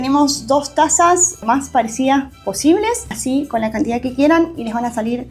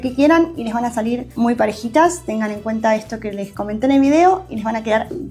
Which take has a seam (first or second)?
first